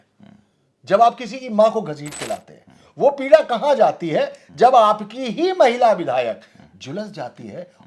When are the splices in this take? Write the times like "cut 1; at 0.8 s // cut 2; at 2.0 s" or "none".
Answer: none